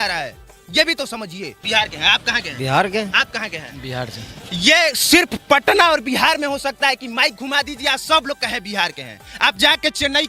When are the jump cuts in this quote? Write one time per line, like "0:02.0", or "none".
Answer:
0:01.5